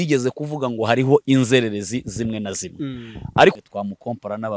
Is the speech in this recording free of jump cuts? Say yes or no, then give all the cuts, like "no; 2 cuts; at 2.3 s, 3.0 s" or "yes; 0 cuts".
no; 1 cut; at 3.6 s